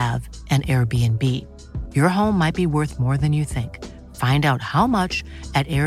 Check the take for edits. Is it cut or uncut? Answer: uncut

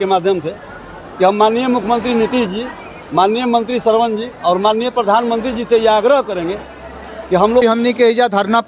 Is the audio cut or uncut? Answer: cut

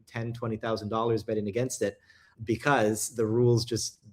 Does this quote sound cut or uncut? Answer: cut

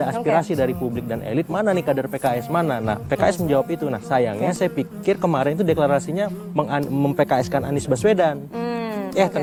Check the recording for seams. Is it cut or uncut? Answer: uncut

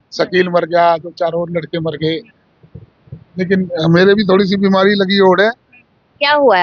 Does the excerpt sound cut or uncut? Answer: uncut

